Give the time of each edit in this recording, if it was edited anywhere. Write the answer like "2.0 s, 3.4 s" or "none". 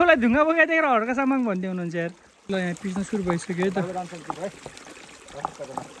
2.3 s